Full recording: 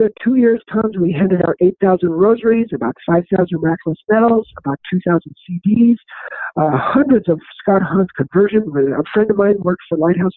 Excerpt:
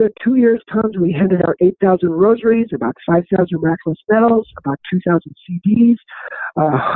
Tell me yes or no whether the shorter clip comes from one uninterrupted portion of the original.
yes